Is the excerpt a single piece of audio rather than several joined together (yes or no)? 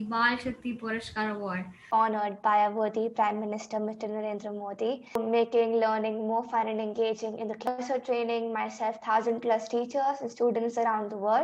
no